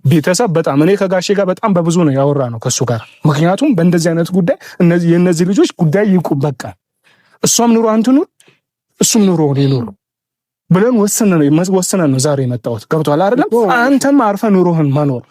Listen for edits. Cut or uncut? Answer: uncut